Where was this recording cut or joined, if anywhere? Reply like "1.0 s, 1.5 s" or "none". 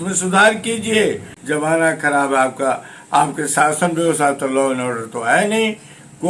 1.3 s